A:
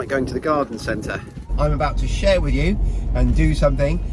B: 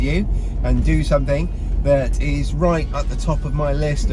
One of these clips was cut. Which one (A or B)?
A